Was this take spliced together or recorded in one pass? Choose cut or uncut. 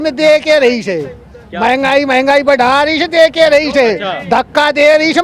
uncut